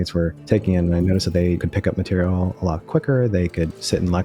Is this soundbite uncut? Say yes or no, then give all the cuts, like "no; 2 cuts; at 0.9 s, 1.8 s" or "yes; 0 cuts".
yes; 0 cuts